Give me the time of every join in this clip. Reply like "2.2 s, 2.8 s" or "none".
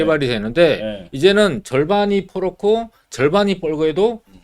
none